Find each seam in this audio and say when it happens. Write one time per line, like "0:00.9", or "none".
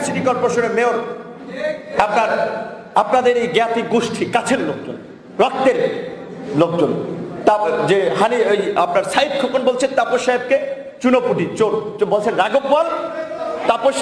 none